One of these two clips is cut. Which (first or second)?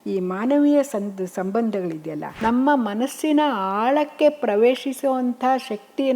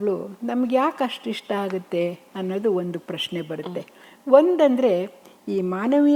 first